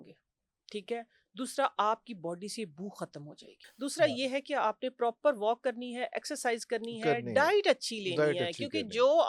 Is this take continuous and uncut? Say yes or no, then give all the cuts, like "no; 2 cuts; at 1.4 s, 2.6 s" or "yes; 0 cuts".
no; 1 cut; at 3.6 s